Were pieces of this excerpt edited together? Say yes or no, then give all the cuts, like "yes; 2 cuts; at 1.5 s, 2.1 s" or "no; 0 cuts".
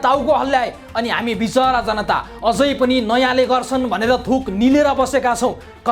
no; 0 cuts